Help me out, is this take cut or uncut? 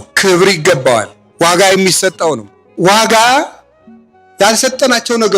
cut